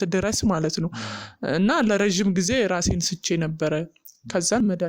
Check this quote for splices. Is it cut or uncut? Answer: uncut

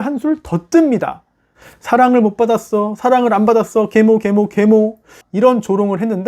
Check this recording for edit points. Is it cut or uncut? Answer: cut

